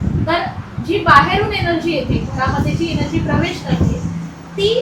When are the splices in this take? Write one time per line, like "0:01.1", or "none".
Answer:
none